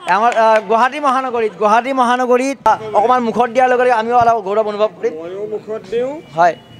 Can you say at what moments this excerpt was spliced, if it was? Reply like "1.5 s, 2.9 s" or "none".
2.7 s